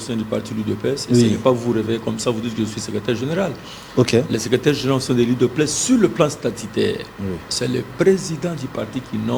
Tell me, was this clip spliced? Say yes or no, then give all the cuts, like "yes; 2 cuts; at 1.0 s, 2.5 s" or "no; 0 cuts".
no; 0 cuts